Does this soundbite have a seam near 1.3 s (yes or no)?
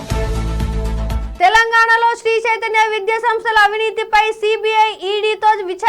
yes